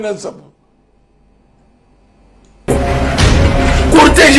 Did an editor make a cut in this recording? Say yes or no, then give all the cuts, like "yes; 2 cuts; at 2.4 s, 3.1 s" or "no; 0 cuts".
yes; 1 cut; at 2.7 s